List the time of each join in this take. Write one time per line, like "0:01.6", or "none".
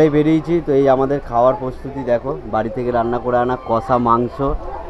none

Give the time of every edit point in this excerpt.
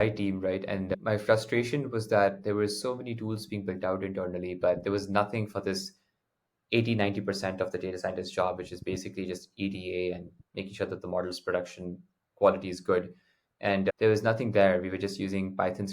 0:00.9

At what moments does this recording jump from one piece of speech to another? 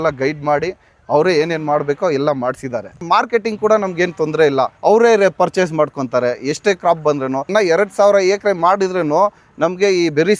0:03.0
0:04.7
0:07.5

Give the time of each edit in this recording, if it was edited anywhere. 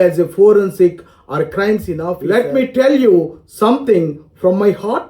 0:02.2

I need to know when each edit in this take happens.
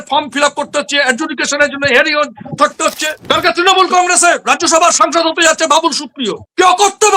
0:03.2

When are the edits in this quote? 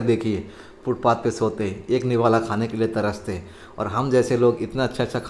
none

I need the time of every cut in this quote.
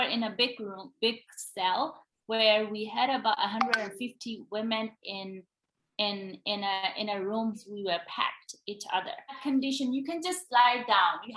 0:07.7
0:09.4

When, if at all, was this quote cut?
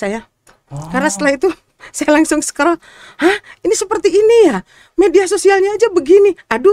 none

